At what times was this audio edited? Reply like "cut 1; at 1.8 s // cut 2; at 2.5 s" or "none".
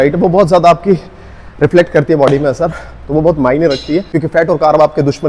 cut 1; at 4.1 s